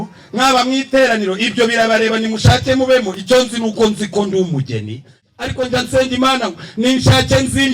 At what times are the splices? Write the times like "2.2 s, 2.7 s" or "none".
5.2 s